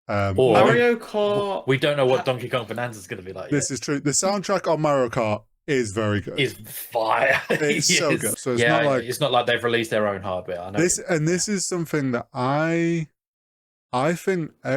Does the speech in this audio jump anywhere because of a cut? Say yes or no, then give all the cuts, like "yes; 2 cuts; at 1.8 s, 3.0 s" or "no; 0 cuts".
yes; 1 cut; at 8.3 s